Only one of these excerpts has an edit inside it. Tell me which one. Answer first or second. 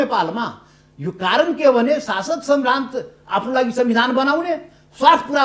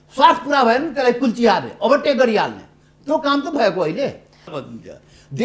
second